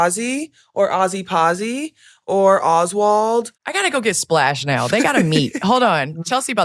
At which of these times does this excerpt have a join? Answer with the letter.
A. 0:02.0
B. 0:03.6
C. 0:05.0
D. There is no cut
B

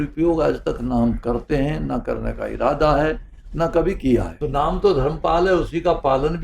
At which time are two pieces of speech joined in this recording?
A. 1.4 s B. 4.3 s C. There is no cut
B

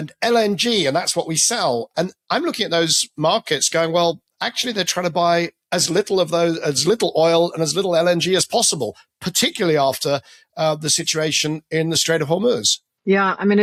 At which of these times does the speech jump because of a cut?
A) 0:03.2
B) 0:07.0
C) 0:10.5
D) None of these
D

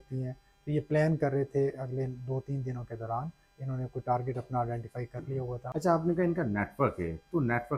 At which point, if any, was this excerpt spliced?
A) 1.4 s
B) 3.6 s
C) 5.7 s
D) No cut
C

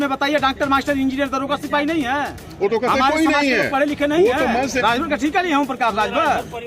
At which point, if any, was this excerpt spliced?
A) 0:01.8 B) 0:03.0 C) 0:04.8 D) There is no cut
C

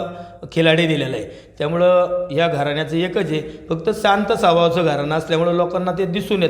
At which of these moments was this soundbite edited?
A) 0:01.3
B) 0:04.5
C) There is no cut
C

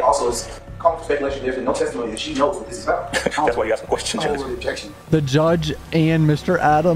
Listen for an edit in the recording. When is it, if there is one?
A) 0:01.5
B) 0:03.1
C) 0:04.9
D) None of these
C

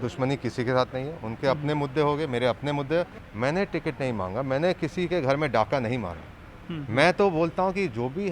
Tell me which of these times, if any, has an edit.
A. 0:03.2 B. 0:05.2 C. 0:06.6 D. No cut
A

